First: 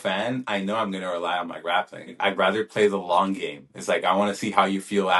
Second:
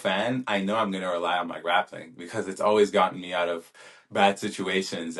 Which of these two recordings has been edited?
first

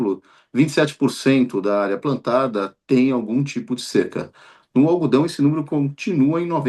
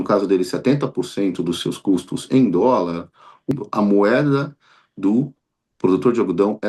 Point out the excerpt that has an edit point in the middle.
second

